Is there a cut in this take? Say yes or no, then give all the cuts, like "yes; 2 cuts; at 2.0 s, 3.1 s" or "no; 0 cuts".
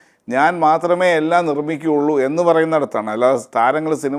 no; 0 cuts